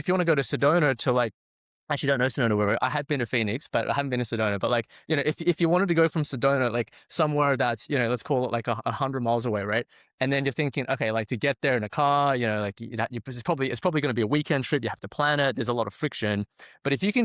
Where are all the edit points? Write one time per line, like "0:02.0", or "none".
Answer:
none